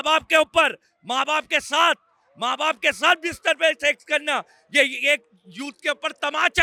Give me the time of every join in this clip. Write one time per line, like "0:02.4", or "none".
none